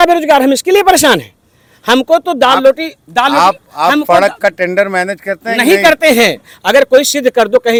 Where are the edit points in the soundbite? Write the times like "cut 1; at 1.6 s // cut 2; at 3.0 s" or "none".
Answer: none